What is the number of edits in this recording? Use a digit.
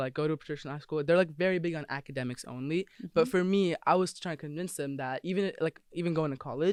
0